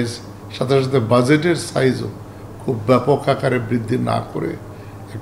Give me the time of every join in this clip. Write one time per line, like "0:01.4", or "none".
none